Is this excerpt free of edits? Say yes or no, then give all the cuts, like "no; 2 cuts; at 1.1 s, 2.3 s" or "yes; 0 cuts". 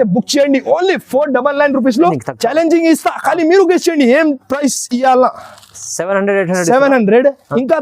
no; 1 cut; at 2.1 s